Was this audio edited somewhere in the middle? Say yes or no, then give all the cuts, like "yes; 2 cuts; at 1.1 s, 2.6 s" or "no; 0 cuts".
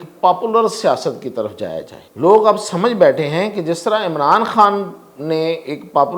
yes; 1 cut; at 2.0 s